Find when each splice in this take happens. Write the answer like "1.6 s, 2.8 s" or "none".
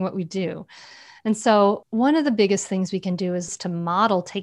1.8 s, 3.5 s

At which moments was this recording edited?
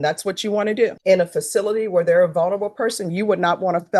1.0 s

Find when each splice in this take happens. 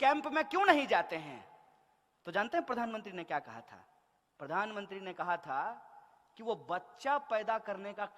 none

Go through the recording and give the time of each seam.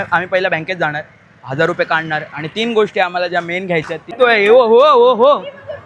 4.1 s

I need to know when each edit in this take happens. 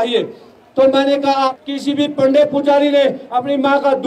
1.5 s

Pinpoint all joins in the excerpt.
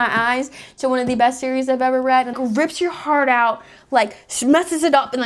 2.3 s

